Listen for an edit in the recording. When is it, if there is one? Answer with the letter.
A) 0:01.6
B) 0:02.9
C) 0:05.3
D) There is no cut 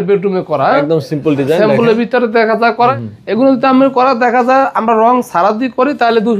B